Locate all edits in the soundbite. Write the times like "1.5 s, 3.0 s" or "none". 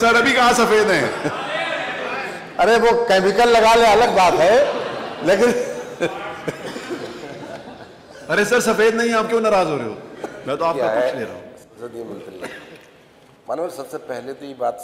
none